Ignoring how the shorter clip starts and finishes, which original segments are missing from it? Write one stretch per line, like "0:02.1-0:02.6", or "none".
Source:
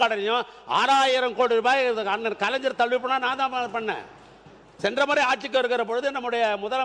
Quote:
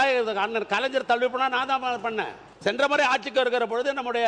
0:04.1-0:04.6

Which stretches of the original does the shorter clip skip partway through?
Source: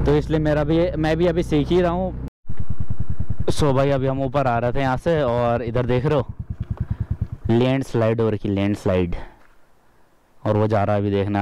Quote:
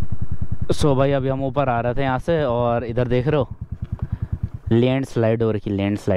none

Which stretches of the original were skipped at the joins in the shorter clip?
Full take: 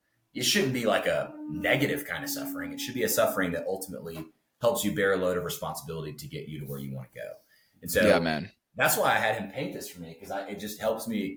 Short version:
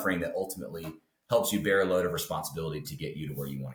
none

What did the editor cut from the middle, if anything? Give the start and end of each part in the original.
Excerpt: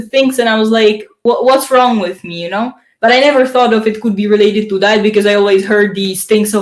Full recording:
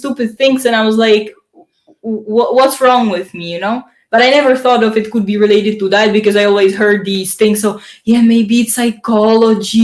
0:01.4-0:02.2

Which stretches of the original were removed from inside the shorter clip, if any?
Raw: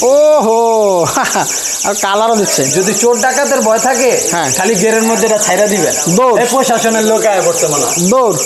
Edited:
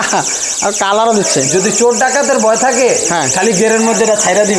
none

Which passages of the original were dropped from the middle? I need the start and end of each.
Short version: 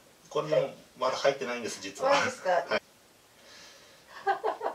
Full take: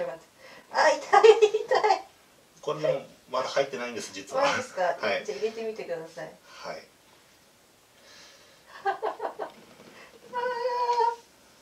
0:05.1-0:07.4

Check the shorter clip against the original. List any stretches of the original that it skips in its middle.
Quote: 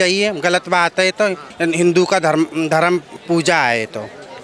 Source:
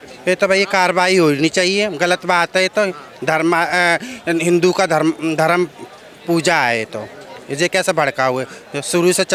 0:03.0-0:04.1
0:05.8-0:06.1

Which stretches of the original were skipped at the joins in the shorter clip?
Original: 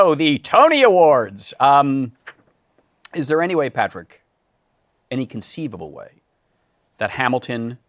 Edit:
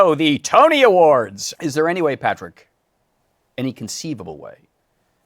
0:01.4-0:02.9

